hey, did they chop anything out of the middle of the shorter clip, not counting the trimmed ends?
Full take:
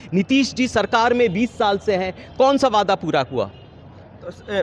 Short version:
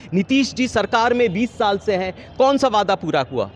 no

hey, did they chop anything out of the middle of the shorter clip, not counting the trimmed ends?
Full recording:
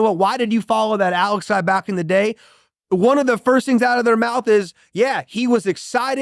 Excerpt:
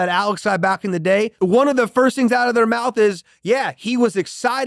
yes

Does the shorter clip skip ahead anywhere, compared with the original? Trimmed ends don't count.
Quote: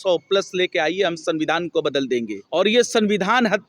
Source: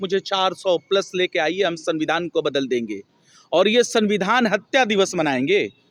yes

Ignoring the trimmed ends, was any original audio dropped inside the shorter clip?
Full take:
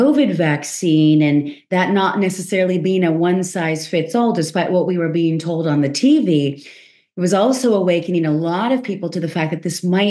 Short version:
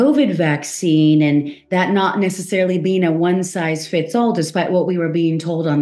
no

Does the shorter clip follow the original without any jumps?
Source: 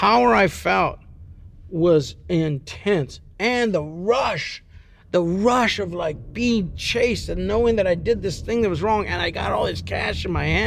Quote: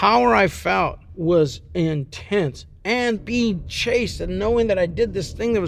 no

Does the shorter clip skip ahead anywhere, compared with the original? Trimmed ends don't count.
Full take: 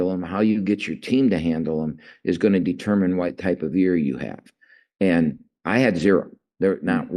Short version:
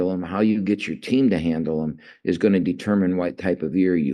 no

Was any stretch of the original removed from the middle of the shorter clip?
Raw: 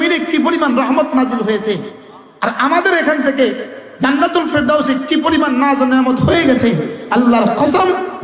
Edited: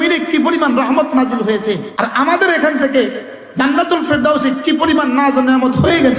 yes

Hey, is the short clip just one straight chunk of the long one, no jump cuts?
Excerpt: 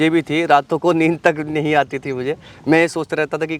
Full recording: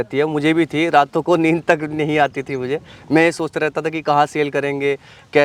yes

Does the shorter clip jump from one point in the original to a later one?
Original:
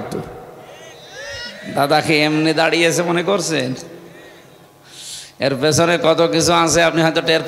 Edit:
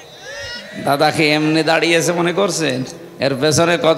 yes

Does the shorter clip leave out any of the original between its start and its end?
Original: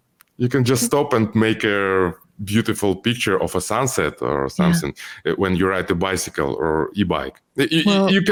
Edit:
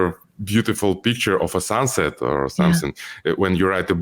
no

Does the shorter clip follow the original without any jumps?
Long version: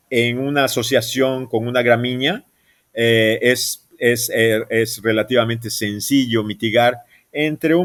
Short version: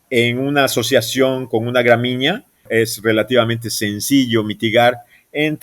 no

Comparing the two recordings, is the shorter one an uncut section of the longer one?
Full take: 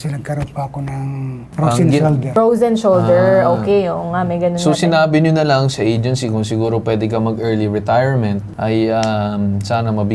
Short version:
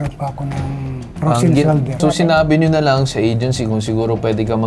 no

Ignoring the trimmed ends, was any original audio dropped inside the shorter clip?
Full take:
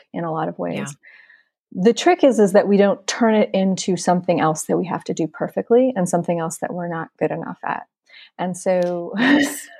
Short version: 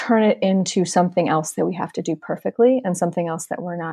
no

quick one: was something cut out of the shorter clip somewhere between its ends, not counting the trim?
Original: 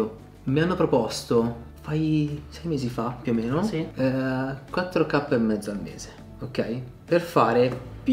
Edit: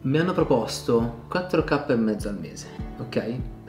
yes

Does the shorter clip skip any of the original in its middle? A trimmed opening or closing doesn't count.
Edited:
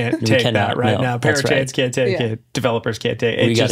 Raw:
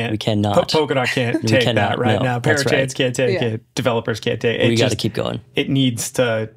no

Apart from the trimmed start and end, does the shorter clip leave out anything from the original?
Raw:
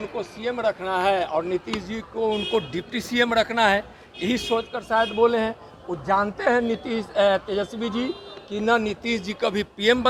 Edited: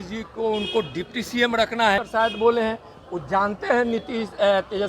yes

